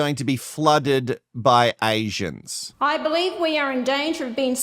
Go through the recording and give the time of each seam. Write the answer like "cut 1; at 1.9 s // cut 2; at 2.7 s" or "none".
cut 1; at 2.8 s